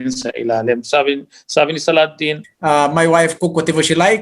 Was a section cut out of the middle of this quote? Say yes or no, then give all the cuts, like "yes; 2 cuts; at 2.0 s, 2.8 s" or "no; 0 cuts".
yes; 1 cut; at 2.5 s